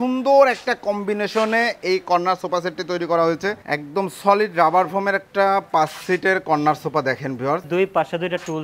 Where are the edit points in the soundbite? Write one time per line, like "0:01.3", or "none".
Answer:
0:03.6
0:07.7